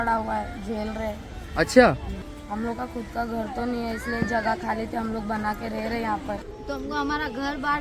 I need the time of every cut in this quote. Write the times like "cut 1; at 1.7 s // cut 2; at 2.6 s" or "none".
cut 1; at 2.3 s // cut 2; at 6.4 s